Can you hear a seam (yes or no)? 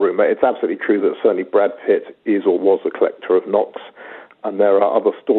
yes